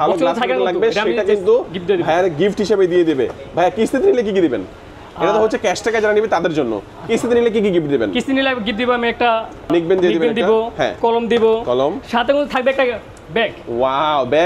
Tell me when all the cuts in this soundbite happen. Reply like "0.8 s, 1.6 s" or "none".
9.7 s